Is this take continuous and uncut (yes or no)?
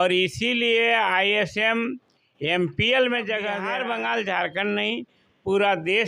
no